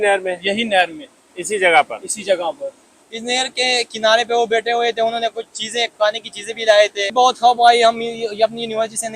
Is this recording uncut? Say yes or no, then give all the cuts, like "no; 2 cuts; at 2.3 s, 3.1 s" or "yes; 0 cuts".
no; 2 cuts; at 3.1 s, 7.1 s